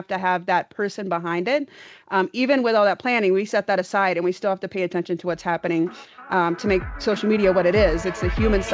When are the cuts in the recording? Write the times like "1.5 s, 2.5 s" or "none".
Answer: none